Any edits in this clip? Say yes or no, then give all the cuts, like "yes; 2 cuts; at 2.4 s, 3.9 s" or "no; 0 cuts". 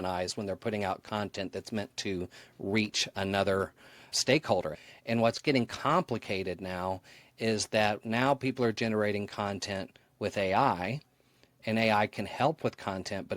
yes; 1 cut; at 4.7 s